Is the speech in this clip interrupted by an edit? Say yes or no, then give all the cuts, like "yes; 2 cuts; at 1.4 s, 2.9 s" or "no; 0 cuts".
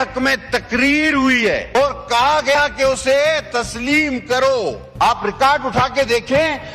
yes; 2 cuts; at 1.8 s, 4.4 s